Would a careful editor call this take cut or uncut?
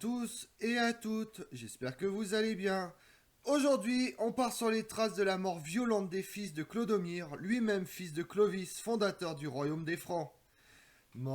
cut